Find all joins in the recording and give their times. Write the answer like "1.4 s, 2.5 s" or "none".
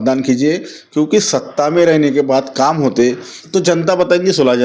3.3 s